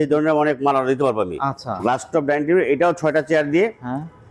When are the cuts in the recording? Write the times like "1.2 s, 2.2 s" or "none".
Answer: 1.7 s